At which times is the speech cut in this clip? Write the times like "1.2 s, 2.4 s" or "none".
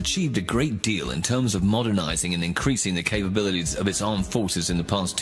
3.1 s